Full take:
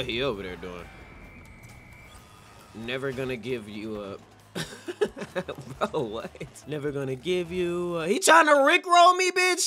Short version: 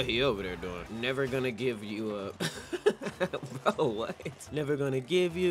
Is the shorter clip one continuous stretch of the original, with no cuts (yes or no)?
no